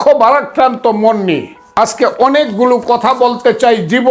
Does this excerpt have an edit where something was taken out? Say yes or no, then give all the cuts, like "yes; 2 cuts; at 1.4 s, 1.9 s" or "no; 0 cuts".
yes; 1 cut; at 1.6 s